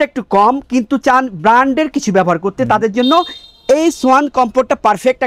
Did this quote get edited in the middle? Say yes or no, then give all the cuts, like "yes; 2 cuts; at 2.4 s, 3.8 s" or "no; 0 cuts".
no; 0 cuts